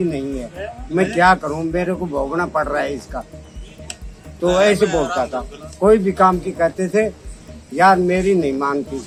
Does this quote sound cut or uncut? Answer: uncut